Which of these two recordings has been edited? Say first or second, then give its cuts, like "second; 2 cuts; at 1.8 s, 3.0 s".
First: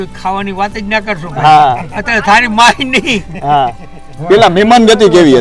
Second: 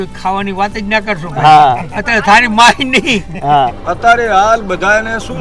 second; 1 cut; at 3.8 s